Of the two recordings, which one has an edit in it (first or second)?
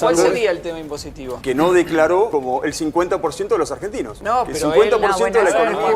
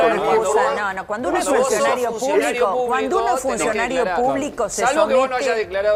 first